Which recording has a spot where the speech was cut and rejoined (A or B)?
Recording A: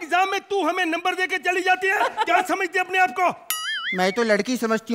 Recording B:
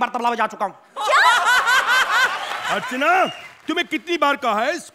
B